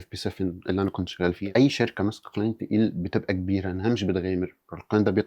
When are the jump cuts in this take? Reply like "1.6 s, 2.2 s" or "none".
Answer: 1.4 s